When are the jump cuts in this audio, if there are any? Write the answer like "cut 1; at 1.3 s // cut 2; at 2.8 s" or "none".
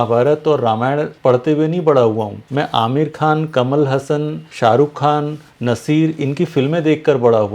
cut 1; at 1.1 s // cut 2; at 2.4 s // cut 3; at 4.4 s